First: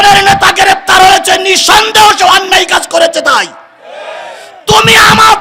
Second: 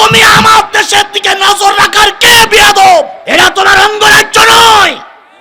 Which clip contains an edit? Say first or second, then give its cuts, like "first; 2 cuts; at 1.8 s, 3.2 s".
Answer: second; 1 cut; at 3.2 s